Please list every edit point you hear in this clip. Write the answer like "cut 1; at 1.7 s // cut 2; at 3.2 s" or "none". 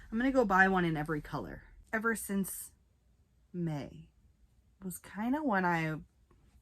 cut 1; at 1.7 s